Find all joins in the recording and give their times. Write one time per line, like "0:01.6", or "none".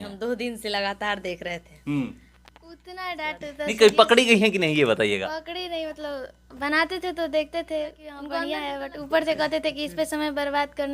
0:02.9
0:08.2